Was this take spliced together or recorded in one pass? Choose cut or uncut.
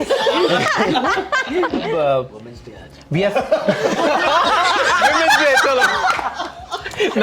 cut